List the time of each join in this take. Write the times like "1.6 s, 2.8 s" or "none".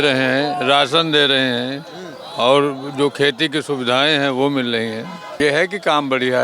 5.3 s